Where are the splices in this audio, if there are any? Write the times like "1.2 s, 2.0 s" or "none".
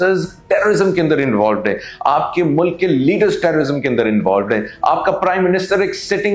none